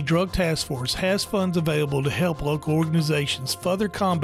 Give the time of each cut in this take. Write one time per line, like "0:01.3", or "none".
none

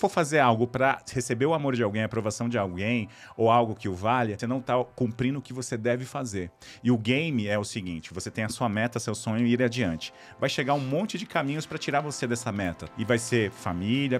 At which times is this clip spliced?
0:04.4
0:12.8

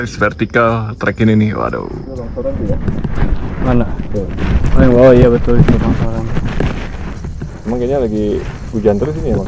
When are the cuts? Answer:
0:02.2

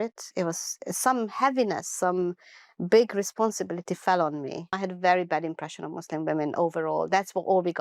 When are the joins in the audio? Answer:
0:04.7

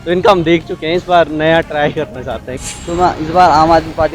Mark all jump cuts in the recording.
0:02.5

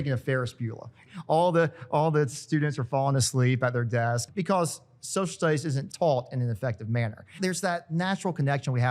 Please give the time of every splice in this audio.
0:01.0
0:04.2
0:05.8
0:07.3

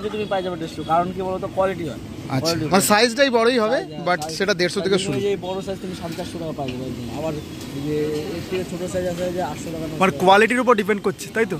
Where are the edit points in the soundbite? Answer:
none

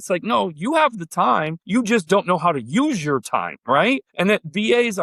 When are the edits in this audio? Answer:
0:01.6
0:04.1

